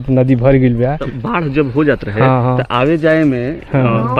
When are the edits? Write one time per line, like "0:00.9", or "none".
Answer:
0:01.1